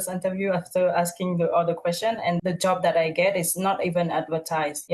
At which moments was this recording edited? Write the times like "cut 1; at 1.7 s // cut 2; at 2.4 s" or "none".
none

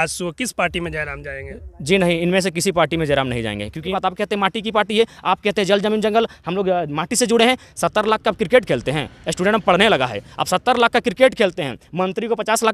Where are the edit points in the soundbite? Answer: cut 1; at 3.9 s

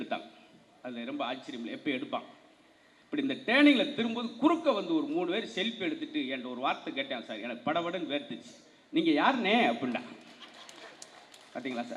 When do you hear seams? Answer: none

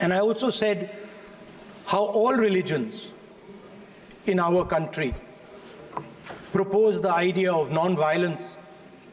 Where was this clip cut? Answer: none

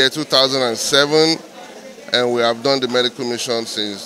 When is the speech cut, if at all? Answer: none

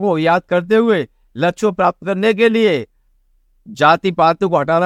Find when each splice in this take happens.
none

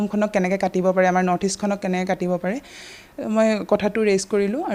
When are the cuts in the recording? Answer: none

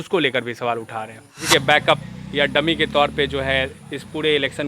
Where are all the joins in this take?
cut 1; at 1.7 s

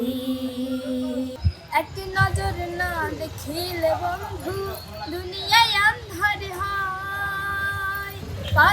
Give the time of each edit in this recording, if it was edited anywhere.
cut 1; at 1.4 s

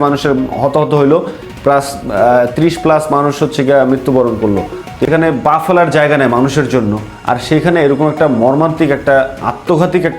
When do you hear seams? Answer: cut 1; at 5.1 s

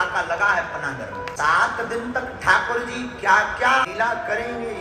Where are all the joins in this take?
cut 1; at 1.3 s // cut 2; at 3.9 s

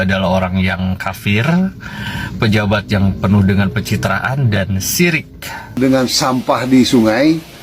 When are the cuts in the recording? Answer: cut 1; at 5.8 s

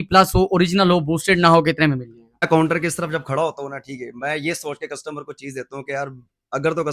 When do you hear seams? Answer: cut 1; at 2.5 s

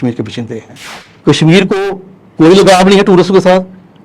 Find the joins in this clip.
cut 1; at 1.0 s

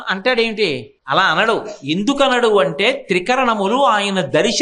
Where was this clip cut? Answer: cut 1; at 0.9 s

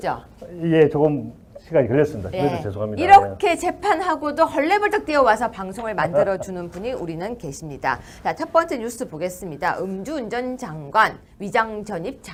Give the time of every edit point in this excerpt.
none

